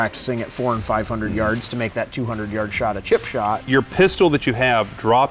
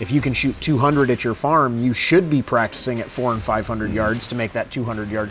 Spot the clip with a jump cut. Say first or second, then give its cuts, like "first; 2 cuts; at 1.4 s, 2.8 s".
first; 1 cut; at 3.6 s